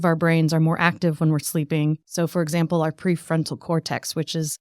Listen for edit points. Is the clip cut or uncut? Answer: cut